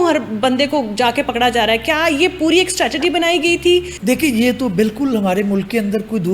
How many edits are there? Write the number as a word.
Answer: one